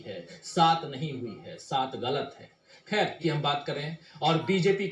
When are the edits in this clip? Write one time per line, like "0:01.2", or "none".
0:03.2